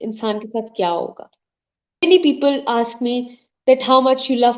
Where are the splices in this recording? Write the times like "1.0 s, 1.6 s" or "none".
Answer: 2.0 s